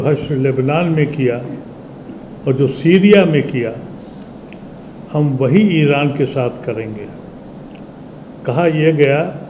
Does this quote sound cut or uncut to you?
uncut